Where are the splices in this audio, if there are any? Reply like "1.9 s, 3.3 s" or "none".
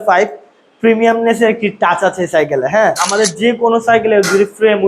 3.0 s